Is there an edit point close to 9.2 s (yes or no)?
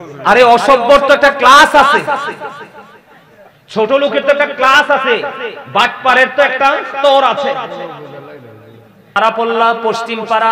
yes